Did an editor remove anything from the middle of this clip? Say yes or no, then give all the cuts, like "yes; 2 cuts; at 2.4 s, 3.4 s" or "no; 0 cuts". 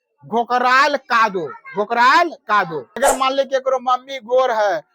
yes; 1 cut; at 3.0 s